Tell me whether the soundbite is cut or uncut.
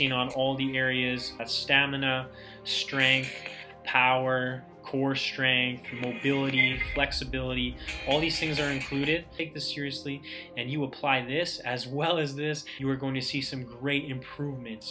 cut